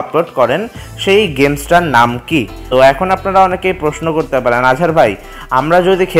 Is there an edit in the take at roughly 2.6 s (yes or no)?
yes